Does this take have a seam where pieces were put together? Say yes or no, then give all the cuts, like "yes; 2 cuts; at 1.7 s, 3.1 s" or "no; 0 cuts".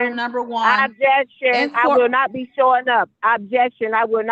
no; 0 cuts